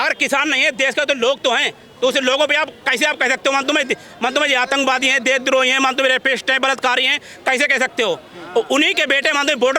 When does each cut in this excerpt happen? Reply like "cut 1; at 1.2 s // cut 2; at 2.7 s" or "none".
none